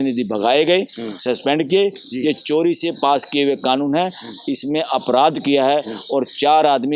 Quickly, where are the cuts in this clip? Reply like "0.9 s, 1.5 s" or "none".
none

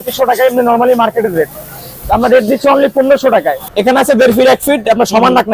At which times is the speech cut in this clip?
3.8 s

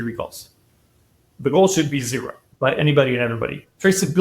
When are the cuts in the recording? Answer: 2.4 s

